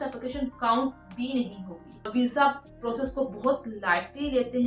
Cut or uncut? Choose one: cut